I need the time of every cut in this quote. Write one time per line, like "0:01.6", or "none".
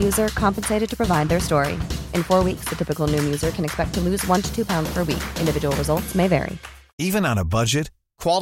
0:06.9